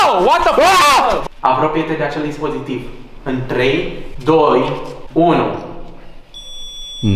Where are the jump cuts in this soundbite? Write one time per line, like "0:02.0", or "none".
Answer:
0:01.2
0:04.1
0:04.9